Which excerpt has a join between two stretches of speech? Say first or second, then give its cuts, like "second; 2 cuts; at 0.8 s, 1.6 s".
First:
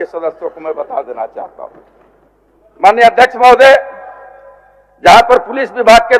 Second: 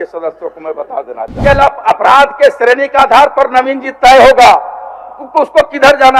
second; 1 cut; at 1.3 s